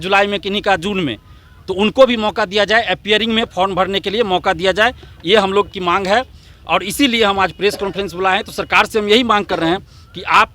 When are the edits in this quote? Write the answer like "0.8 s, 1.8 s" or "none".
none